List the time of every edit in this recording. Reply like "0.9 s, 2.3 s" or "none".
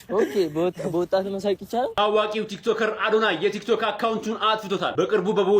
1.9 s